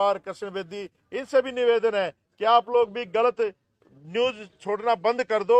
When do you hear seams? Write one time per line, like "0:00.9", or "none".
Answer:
none